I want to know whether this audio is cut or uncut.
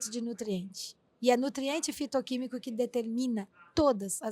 uncut